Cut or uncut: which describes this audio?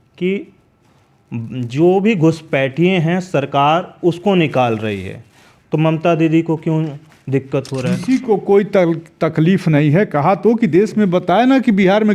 uncut